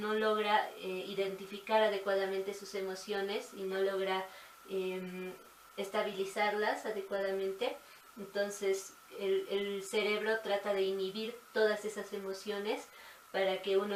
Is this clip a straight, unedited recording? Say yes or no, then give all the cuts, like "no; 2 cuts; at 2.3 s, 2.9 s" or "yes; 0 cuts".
yes; 0 cuts